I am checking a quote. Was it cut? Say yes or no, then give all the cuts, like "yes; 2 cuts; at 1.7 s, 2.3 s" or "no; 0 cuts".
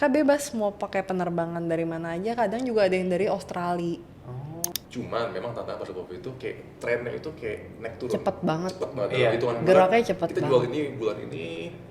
yes; 1 cut; at 4.7 s